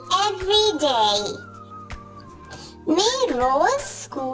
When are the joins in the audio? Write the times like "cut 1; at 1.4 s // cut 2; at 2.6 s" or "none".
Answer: cut 1; at 1.4 s // cut 2; at 2.6 s